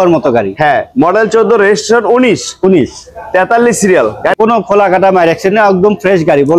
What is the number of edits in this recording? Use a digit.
1